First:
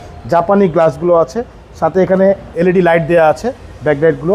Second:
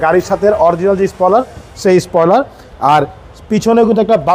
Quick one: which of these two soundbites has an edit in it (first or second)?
first